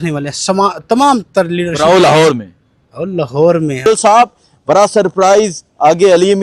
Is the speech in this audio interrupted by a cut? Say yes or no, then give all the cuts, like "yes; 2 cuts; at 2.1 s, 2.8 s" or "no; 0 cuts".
yes; 1 cut; at 3.8 s